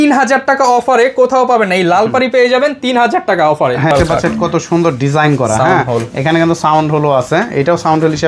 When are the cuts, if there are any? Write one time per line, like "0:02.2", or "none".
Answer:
0:03.9